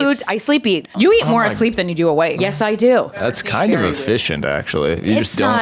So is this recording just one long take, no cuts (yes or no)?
no